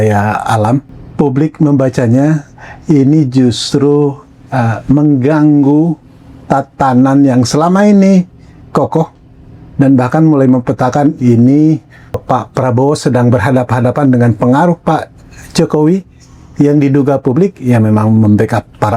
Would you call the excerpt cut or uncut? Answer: cut